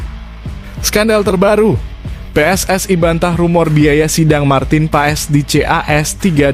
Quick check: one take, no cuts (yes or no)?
no